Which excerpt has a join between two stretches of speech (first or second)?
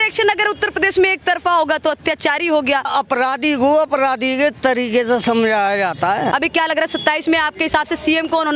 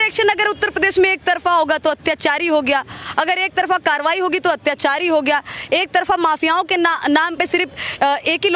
first